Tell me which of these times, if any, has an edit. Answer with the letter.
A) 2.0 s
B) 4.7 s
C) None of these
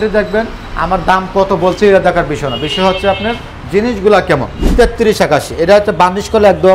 B